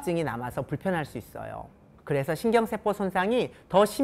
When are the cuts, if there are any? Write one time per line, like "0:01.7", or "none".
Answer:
0:01.9